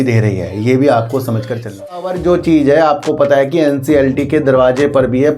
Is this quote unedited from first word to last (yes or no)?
no